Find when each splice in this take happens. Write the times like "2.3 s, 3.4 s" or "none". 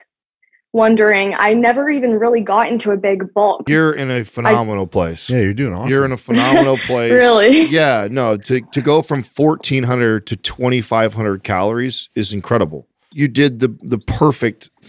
3.7 s, 13.1 s